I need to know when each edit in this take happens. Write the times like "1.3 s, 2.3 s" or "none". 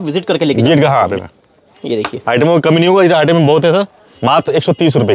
1.1 s, 4.0 s

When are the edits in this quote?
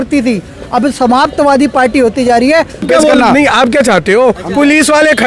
2.9 s

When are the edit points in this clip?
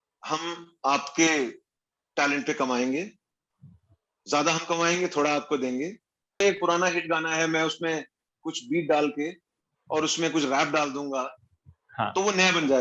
6.4 s

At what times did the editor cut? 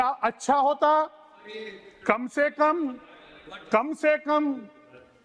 none

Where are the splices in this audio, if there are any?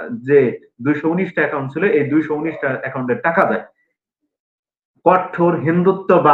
3.9 s

